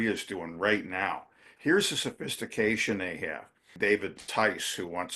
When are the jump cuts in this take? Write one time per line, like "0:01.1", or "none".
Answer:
0:03.7